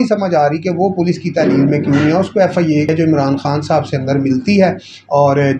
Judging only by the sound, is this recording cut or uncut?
cut